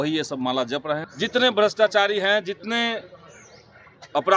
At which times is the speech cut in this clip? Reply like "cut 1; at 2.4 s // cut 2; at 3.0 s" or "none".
cut 1; at 1.1 s